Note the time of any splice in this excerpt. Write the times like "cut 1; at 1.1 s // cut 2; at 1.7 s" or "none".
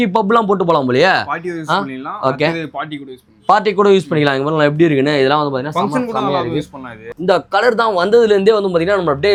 none